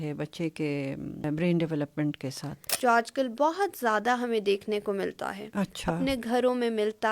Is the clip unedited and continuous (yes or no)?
no